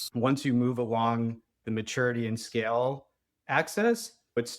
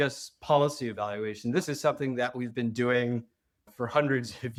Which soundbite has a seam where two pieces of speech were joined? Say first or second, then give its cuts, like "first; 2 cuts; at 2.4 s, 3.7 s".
first; 1 cut; at 1.6 s